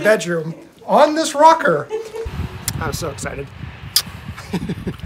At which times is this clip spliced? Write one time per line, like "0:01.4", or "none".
0:02.1

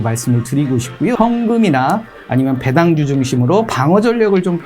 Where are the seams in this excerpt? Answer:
0:01.2

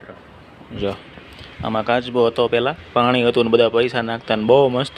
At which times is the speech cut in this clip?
none

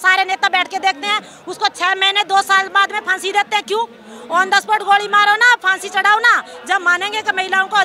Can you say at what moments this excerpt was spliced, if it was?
none

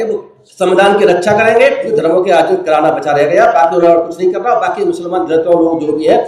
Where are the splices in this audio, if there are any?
0:01.9

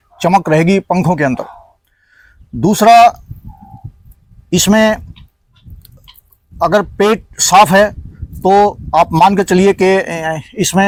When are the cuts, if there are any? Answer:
none

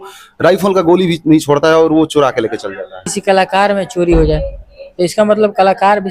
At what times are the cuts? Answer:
0:03.1

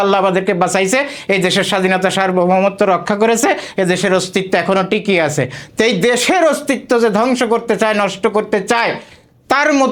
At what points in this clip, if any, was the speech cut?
none

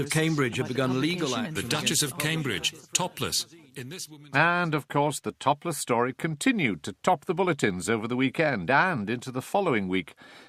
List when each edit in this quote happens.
none

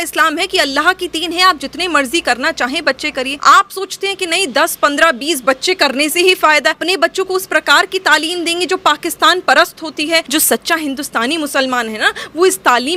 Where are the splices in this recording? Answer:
0:03.3
0:06.8
0:10.3

